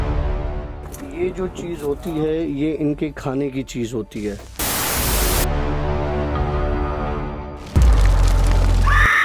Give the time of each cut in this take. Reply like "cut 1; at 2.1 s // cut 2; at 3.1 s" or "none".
none